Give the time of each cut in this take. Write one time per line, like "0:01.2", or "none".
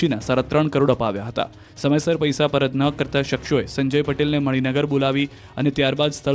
0:02.6